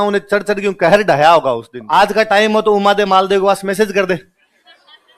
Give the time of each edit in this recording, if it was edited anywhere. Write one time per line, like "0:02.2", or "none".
0:01.7